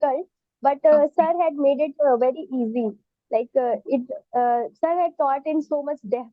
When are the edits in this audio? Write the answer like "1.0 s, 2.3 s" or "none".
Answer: none